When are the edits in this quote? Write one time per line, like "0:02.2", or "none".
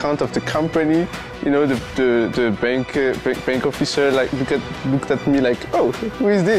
none